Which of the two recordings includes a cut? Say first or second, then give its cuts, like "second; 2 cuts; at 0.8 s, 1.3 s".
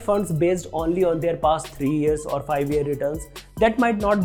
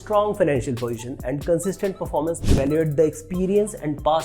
second; 1 cut; at 2.4 s